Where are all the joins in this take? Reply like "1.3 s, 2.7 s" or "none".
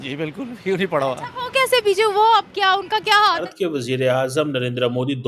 3.5 s